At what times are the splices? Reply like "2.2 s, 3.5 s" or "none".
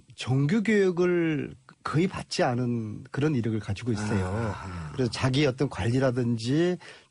none